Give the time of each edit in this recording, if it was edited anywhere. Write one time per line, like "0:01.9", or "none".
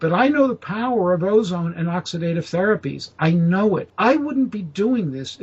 0:03.9